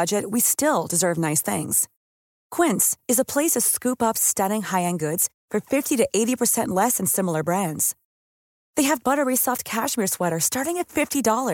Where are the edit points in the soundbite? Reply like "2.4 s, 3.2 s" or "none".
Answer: none